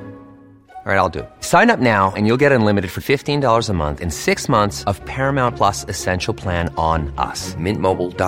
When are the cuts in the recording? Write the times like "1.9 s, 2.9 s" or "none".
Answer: none